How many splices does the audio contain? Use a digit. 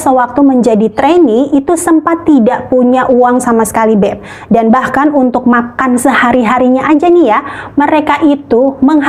0